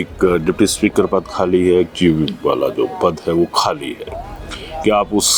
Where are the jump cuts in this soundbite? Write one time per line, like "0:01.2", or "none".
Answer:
none